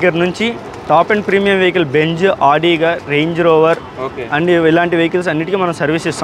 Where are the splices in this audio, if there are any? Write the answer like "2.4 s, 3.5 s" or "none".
none